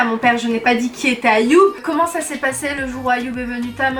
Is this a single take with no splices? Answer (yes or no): no